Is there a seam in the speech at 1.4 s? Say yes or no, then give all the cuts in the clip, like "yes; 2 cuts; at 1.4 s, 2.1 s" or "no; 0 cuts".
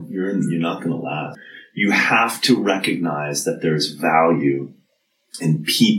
yes; 1 cut; at 1.4 s